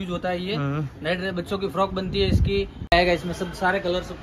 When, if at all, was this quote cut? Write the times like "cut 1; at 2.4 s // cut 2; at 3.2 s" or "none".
cut 1; at 2.8 s